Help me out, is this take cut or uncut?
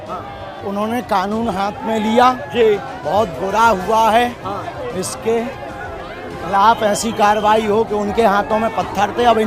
uncut